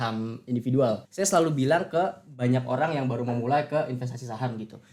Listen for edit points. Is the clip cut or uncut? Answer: cut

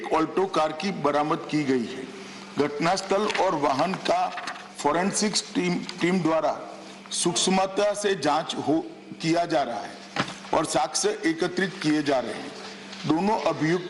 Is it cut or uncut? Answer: uncut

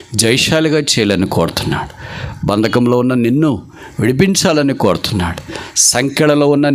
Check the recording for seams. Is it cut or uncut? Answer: uncut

